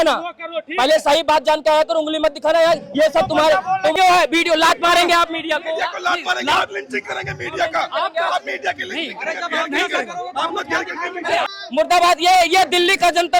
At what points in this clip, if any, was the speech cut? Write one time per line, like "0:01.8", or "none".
0:04.0
0:11.5